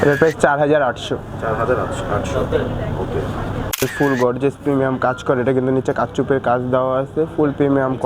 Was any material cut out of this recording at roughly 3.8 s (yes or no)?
yes